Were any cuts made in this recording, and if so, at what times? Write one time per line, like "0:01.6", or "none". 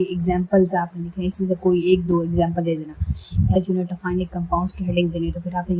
0:03.5